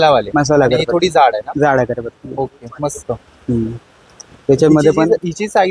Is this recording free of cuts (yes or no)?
yes